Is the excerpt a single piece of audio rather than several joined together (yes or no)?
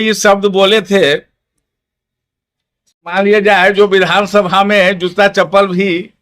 no